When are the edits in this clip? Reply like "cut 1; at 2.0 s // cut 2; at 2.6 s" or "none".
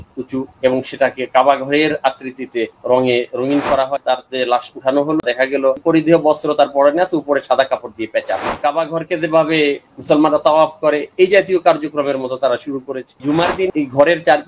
cut 1; at 4.0 s // cut 2; at 5.7 s // cut 3; at 8.6 s // cut 4; at 13.3 s